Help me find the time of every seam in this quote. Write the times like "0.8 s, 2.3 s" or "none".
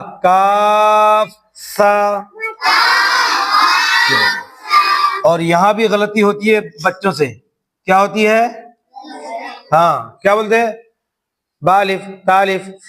5.1 s

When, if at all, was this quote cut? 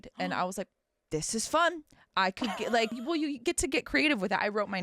3.0 s

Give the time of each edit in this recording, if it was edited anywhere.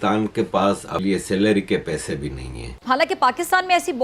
1.0 s

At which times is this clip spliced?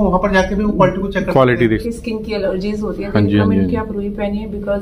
1.8 s

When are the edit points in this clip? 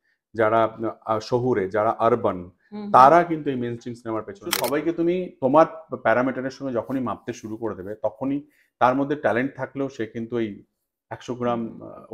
4.5 s

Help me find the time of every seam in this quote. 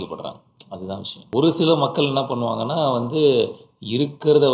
1.2 s

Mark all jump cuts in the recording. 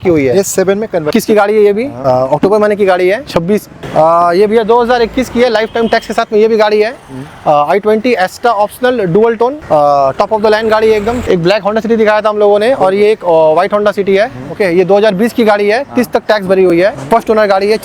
1.1 s, 3.7 s, 11.2 s

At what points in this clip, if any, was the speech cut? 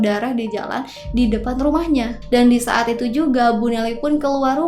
2.2 s

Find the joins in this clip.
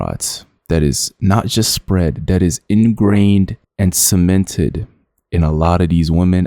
none

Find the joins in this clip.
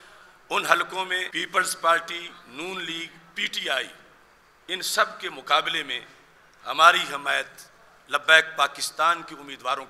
1.3 s

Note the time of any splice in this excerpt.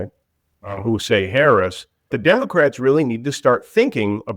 2.1 s

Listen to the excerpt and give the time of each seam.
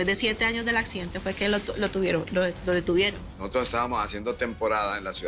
3.3 s

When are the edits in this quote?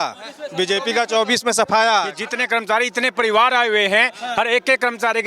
2.3 s

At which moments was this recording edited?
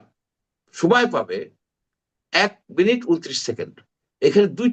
none

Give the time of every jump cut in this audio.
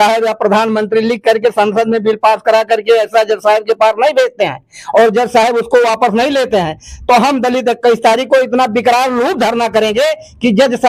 none

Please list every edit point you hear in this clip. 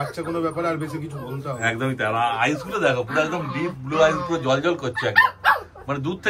none

